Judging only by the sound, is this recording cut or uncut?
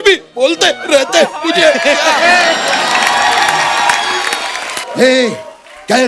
cut